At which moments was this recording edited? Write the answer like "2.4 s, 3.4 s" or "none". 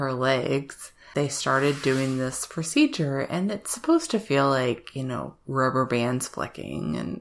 1.0 s